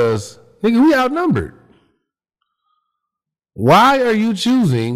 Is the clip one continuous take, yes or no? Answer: yes